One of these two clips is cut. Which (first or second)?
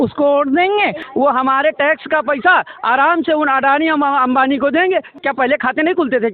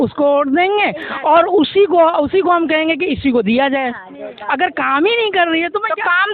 first